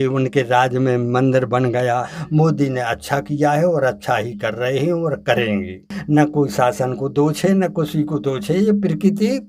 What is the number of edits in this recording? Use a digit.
2